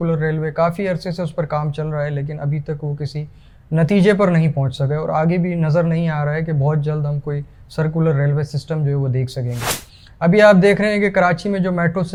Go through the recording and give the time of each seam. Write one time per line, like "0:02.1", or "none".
none